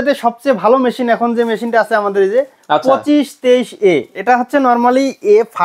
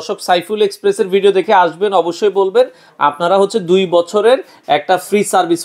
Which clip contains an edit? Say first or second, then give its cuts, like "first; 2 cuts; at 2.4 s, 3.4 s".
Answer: first; 1 cut; at 4.1 s